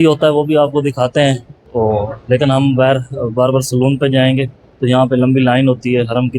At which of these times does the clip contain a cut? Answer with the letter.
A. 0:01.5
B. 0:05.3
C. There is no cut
A